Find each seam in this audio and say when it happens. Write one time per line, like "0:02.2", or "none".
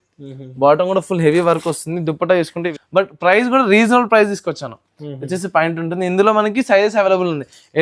0:02.7